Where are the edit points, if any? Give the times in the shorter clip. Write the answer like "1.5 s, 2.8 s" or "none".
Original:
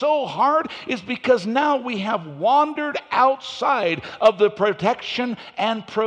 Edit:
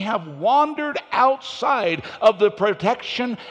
none